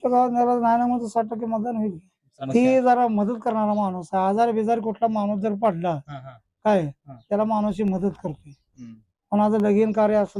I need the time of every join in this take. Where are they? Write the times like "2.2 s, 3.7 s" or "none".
2.3 s